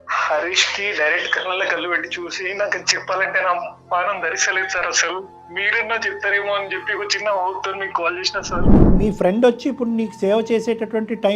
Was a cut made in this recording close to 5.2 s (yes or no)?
no